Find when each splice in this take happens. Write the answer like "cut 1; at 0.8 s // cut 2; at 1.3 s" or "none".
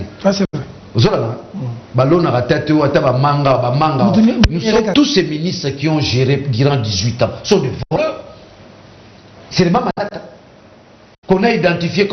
cut 1; at 4.9 s